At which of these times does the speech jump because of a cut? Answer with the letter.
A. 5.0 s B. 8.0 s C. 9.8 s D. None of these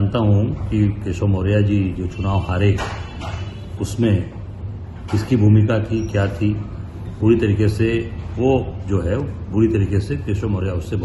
D